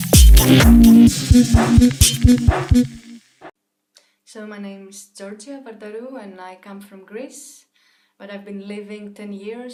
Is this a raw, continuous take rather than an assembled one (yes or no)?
yes